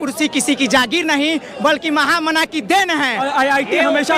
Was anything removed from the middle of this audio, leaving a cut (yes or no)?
yes